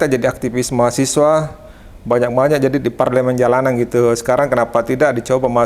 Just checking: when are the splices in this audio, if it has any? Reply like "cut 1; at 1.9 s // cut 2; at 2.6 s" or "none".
none